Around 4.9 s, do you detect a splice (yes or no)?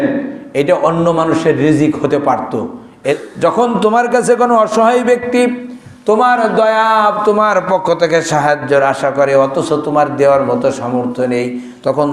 no